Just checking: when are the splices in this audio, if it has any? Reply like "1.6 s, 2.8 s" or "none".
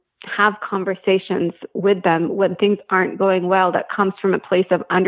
none